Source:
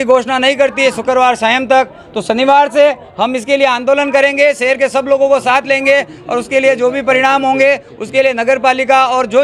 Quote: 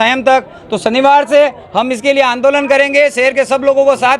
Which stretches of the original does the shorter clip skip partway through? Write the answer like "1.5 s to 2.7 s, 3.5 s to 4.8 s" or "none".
none